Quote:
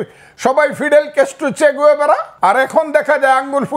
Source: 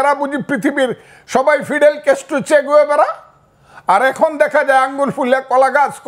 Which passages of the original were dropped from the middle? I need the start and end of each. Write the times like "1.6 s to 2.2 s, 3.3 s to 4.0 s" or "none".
3.2 s to 3.7 s